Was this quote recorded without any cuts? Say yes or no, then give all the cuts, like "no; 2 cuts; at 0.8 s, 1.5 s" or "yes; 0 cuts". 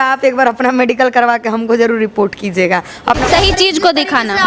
no; 1 cut; at 3.2 s